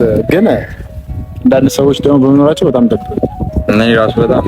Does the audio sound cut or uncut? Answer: uncut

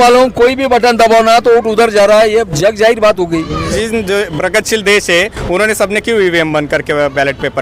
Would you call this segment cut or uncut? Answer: cut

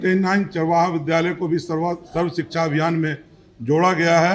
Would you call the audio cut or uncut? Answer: uncut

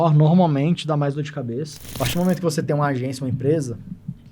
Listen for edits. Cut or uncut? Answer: cut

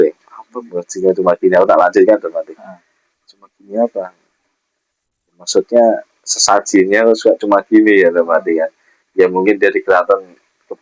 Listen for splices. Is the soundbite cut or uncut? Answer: uncut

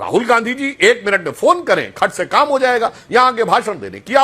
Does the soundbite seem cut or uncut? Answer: uncut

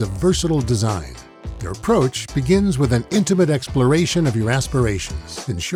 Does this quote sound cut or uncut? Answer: uncut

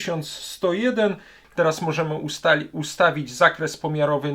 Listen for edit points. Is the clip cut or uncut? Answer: cut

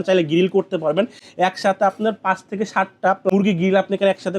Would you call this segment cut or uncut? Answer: cut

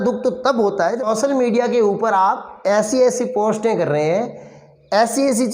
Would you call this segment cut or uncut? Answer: cut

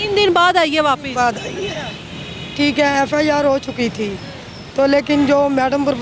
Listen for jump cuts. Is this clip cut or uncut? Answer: uncut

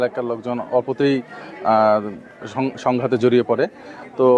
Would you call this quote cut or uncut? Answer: uncut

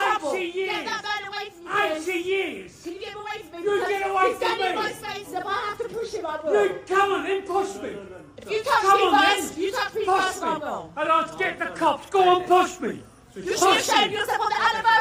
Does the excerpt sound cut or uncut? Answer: uncut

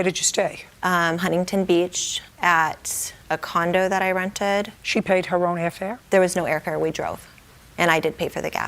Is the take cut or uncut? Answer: cut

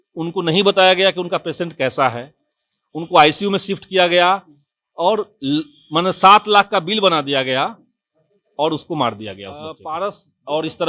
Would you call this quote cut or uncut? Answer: cut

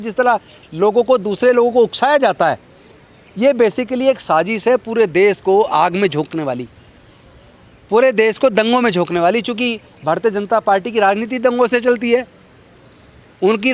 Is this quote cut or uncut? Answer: uncut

